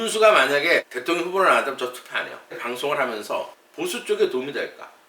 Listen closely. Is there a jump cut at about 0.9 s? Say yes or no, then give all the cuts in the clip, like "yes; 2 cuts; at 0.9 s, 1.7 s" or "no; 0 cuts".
yes; 3 cuts; at 0.9 s, 2.6 s, 3.6 s